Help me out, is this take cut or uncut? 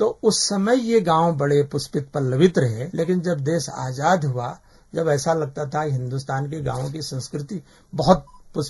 cut